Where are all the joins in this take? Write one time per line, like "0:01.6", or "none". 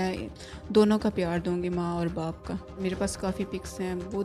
0:02.8